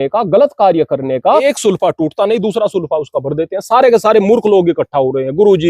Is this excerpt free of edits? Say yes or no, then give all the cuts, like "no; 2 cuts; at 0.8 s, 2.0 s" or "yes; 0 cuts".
no; 1 cut; at 1.4 s